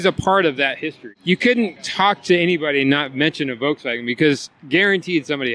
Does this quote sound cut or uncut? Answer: cut